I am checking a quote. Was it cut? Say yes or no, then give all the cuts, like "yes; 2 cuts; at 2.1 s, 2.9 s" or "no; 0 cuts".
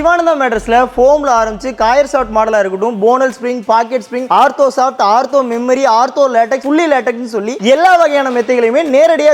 no; 0 cuts